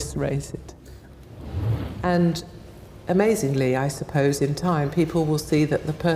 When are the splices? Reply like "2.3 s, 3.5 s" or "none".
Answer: 1.4 s

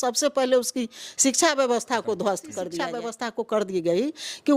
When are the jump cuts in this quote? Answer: 2.7 s

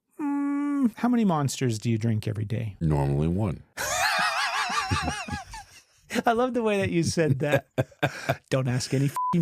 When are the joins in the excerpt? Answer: 1.0 s, 2.6 s, 3.7 s

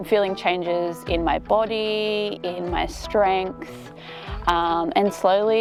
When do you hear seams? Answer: none

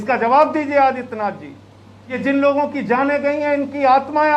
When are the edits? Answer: 2.2 s

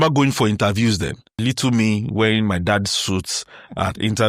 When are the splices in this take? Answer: 1.3 s

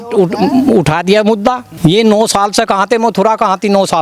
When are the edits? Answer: 1.7 s

